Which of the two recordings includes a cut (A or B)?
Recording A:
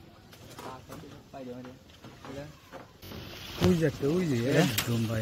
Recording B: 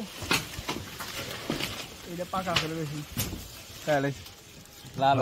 A